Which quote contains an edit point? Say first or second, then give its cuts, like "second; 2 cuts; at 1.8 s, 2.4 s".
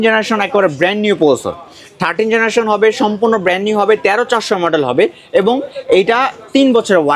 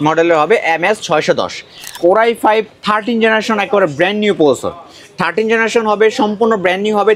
second; 1 cut; at 2.0 s